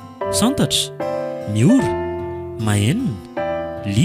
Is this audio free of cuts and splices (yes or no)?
yes